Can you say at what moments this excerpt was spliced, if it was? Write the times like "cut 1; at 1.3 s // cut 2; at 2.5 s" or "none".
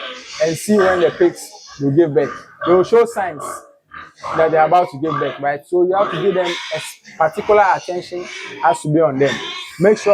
none